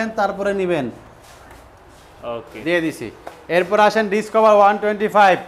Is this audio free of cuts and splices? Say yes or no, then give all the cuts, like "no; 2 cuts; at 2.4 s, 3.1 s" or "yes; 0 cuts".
yes; 0 cuts